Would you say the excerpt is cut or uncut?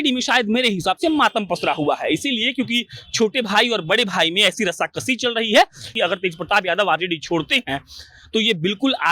cut